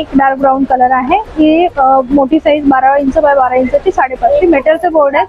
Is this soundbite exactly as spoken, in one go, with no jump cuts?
yes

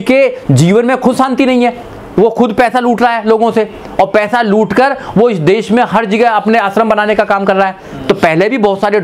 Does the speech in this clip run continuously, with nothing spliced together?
yes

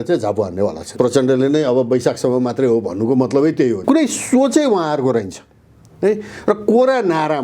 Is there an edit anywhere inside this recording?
yes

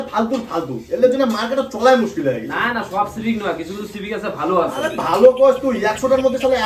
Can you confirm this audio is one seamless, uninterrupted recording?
yes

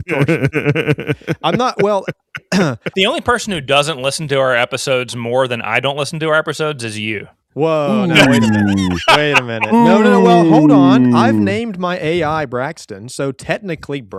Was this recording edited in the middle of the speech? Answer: yes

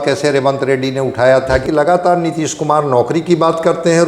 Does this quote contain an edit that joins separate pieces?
yes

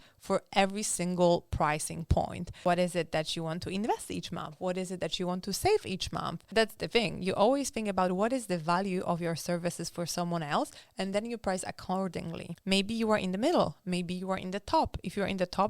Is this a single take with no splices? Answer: no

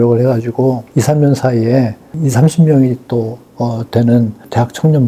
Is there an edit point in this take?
no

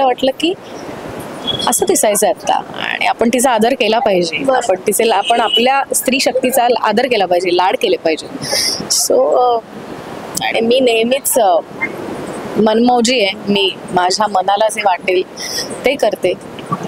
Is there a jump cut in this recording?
no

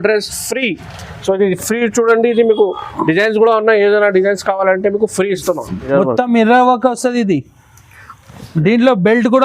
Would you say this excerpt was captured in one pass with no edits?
no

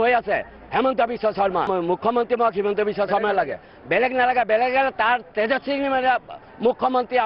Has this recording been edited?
yes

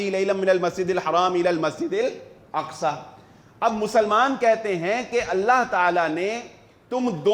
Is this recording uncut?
yes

